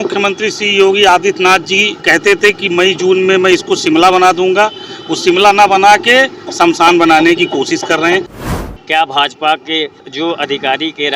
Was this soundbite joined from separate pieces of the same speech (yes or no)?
yes